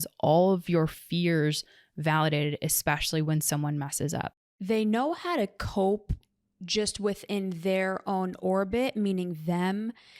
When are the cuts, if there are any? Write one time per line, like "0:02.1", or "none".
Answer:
0:04.3